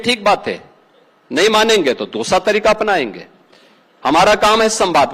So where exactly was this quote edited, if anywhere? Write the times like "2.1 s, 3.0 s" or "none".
none

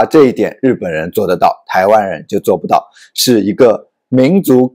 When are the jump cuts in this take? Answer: none

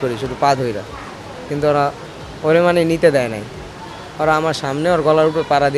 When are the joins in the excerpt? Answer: none

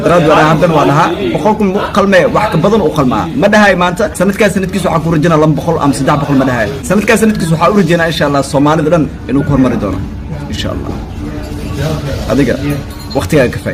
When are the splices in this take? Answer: none

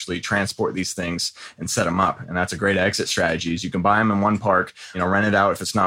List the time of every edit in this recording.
4.9 s

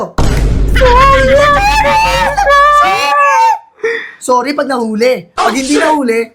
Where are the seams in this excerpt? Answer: none

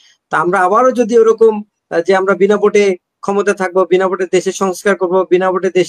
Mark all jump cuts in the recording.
none

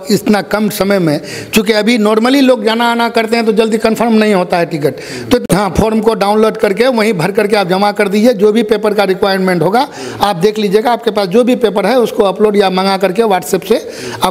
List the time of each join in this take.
5.4 s

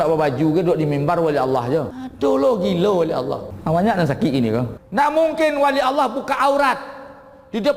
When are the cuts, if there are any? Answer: 2.0 s, 3.5 s, 4.8 s

